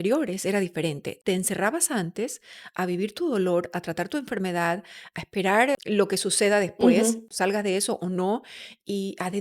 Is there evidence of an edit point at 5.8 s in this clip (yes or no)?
yes